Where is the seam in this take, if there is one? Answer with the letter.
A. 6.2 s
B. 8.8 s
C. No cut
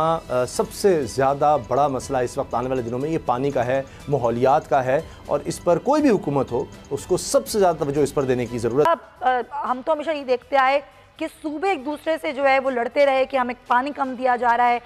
B